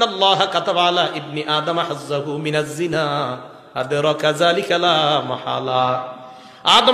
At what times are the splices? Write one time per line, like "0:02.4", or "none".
none